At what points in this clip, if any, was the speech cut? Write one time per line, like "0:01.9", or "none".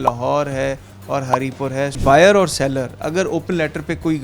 0:02.0